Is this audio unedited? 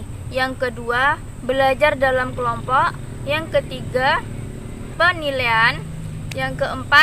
no; 1 cut; at 4.9 s

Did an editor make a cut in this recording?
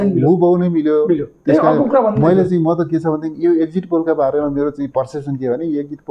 no; 0 cuts

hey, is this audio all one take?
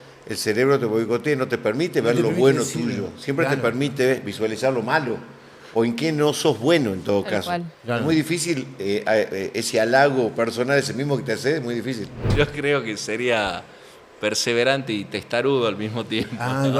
no; 1 cut; at 12.2 s

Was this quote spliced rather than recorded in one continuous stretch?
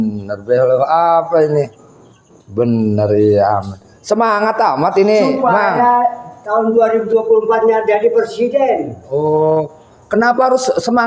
no; 0 cuts

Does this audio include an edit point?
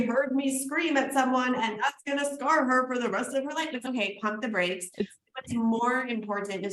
no; 0 cuts

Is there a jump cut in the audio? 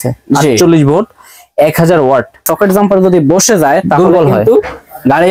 yes; 1 cut; at 2.4 s

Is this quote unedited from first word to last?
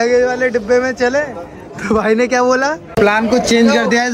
no; 1 cut; at 2.9 s

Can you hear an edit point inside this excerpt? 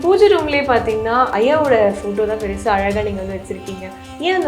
yes; 1 cut; at 1.3 s

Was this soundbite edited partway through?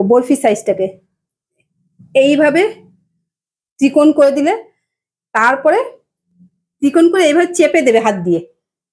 no; 0 cuts

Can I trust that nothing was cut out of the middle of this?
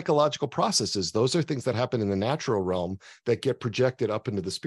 yes; 0 cuts

